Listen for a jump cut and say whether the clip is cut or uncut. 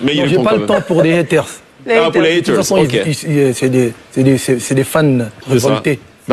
uncut